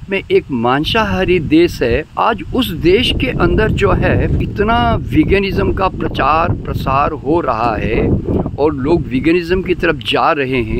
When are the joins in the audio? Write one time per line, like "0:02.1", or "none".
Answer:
0:02.1
0:04.4